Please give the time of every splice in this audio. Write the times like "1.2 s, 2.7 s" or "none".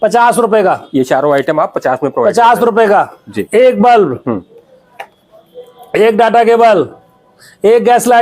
3.3 s

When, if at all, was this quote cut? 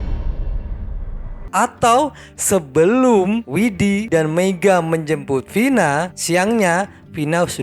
1.5 s

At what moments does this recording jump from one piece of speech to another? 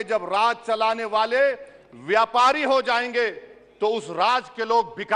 none

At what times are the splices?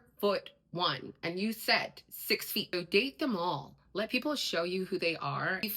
2.7 s

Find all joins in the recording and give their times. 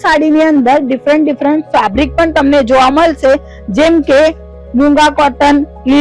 none

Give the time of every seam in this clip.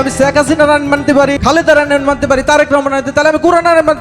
1.4 s

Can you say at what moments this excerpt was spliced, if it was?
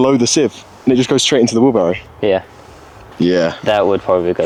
none

